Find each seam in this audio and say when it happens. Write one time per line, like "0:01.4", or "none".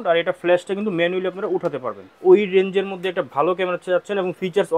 0:02.1

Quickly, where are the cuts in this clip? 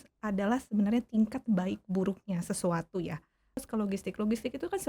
0:03.6

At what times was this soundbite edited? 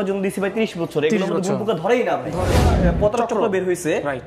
0:02.7

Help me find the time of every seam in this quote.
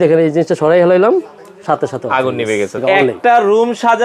0:02.8

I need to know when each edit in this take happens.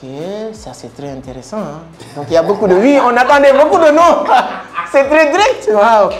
none

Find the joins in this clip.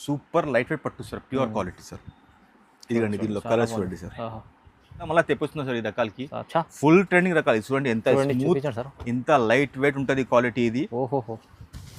0:05.1

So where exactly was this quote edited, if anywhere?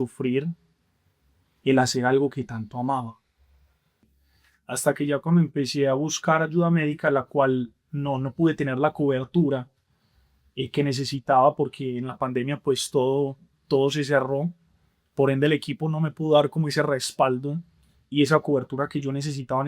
0:04.0

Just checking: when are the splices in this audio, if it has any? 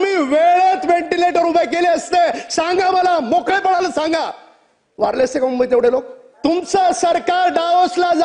0:06.2

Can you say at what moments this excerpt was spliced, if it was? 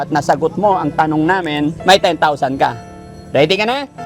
0:01.8

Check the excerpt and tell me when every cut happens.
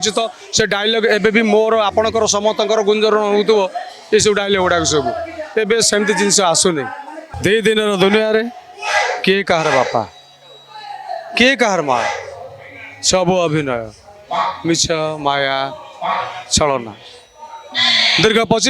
0:07.2

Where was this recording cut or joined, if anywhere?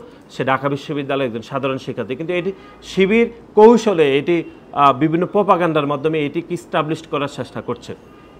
none

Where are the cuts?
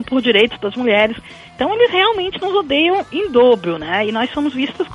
none

